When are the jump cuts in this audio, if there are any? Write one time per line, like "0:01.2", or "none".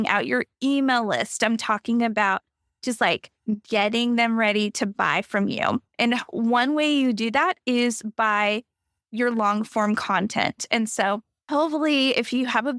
0:11.3